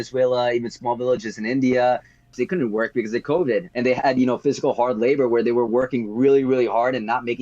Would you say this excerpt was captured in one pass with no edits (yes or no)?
no